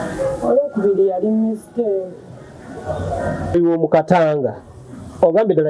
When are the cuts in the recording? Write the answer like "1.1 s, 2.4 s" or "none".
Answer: 3.5 s

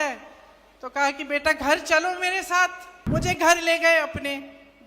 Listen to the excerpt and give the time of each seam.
2.9 s

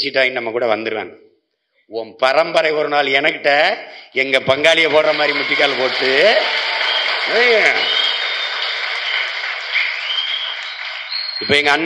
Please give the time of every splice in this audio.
none

